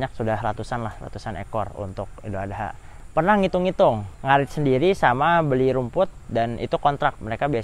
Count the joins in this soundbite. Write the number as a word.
two